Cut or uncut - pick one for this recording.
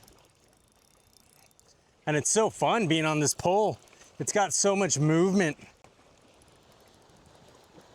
cut